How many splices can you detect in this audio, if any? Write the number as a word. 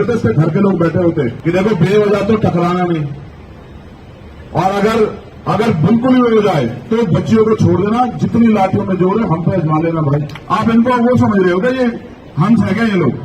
two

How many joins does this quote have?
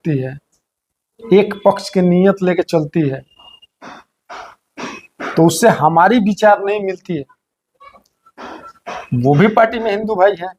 zero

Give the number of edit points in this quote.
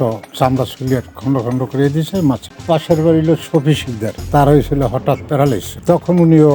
two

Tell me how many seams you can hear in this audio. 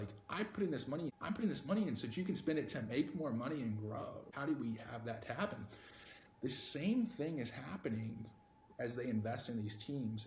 two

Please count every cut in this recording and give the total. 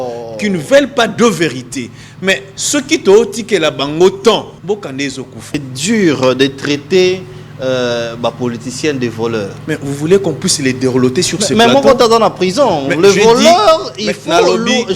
two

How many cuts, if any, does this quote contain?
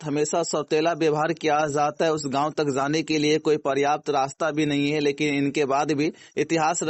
zero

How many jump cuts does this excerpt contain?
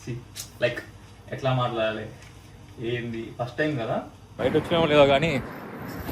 one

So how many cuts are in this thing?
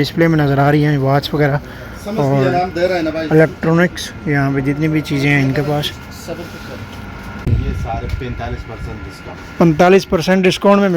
one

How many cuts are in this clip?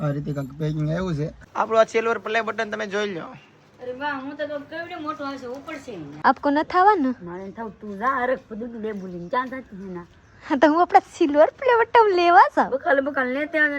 two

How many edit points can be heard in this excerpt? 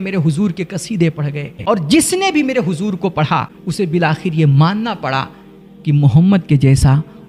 two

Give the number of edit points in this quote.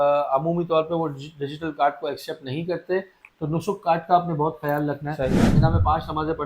two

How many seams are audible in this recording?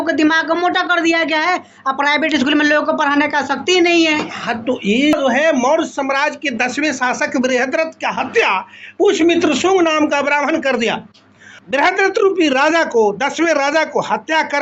two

